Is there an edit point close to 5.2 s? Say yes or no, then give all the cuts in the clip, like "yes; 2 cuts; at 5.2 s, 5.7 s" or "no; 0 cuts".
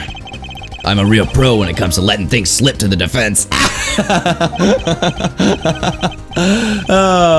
no; 0 cuts